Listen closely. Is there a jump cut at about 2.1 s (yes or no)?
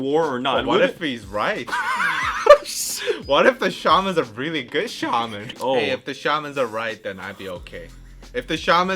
no